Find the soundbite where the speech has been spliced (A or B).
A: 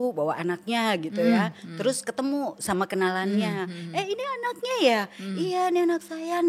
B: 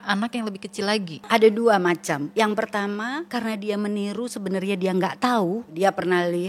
B